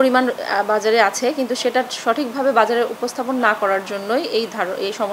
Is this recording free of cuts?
yes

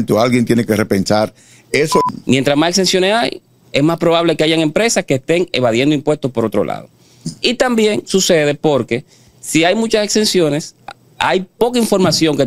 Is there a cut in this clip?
yes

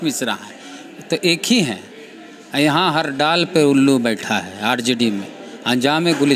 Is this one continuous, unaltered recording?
yes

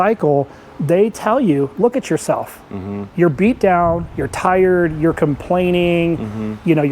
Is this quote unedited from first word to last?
yes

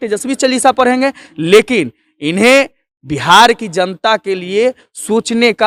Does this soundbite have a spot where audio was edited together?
no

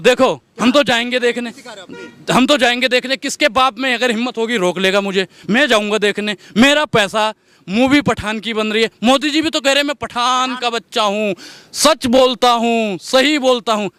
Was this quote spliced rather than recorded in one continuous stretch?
no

